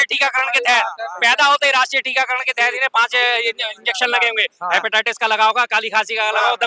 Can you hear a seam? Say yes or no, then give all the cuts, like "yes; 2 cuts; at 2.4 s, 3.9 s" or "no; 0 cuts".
no; 0 cuts